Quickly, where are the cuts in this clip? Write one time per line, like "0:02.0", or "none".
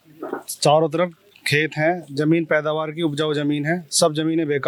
none